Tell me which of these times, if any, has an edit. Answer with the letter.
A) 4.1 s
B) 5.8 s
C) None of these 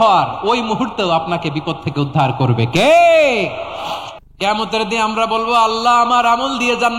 A